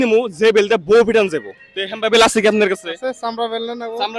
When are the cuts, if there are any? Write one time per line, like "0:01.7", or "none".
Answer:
0:01.5